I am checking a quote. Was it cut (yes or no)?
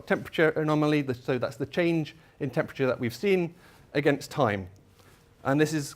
yes